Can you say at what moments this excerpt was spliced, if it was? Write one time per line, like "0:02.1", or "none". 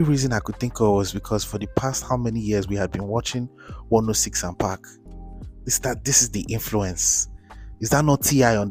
none